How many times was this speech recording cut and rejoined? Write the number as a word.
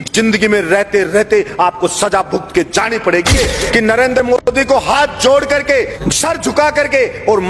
two